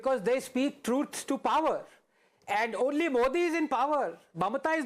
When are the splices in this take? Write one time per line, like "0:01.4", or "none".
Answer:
none